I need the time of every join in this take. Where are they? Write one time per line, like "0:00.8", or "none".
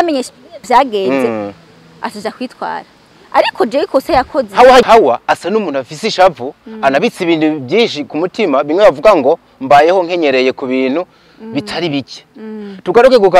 0:04.9